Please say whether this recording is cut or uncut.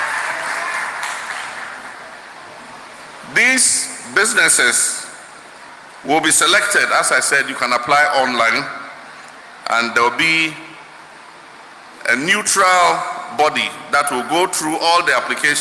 uncut